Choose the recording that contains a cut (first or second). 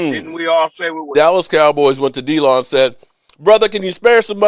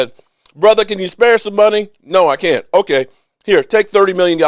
first